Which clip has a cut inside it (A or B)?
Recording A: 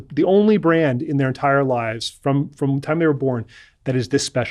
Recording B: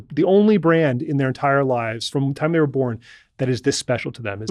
B